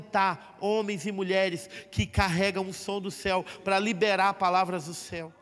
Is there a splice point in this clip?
no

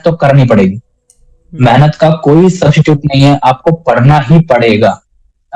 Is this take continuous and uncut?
yes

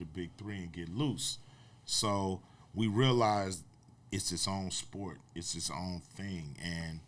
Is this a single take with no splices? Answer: yes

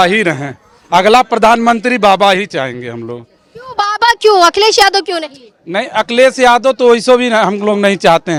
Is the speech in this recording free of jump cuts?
yes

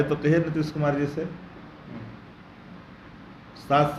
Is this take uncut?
yes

